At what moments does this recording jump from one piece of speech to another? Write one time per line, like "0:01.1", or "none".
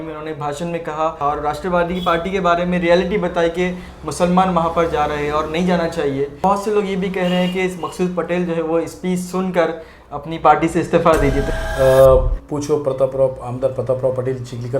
0:01.2
0:06.4
0:11.5